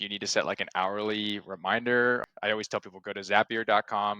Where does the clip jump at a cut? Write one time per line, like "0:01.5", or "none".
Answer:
0:02.3